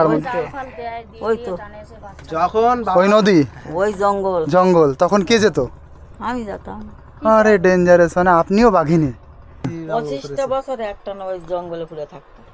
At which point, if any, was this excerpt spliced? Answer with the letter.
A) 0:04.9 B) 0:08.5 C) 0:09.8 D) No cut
C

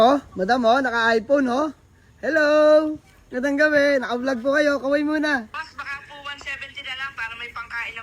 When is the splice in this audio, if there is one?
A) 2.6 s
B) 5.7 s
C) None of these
B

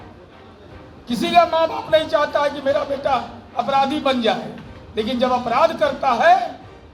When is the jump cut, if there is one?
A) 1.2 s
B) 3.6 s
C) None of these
C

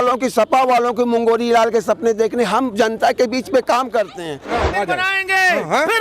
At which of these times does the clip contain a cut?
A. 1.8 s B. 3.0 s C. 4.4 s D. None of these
C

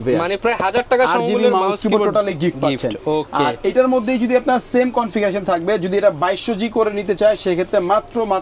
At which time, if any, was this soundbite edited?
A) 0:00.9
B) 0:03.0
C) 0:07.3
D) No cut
D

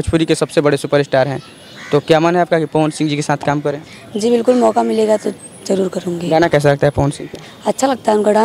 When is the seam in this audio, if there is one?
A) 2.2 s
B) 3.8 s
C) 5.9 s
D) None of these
D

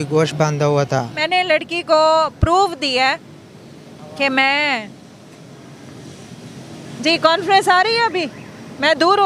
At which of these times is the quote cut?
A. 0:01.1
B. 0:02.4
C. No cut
A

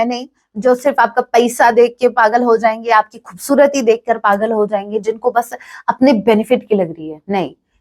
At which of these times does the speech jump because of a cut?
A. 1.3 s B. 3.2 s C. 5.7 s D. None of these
D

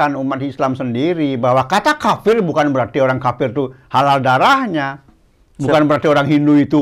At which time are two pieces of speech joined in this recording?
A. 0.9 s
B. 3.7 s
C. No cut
C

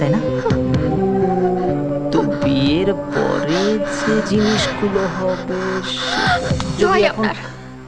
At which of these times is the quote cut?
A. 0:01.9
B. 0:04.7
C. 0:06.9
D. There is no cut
D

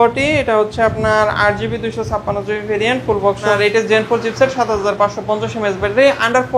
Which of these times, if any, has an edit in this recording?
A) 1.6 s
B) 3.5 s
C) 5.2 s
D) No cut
B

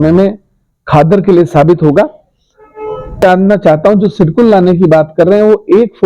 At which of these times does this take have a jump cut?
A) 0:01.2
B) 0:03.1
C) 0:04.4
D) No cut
B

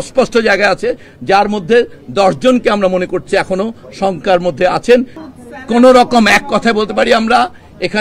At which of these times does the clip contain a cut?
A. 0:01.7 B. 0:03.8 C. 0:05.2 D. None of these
C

